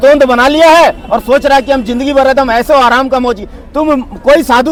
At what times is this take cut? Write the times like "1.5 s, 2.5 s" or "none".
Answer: none